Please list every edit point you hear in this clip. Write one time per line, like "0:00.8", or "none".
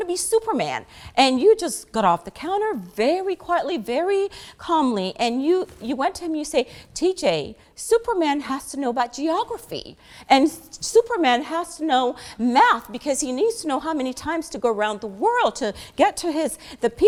none